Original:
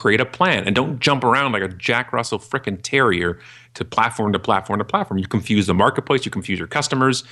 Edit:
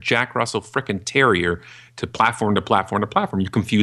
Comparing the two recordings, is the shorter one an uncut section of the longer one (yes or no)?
yes